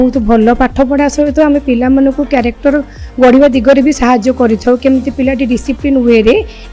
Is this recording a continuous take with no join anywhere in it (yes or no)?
yes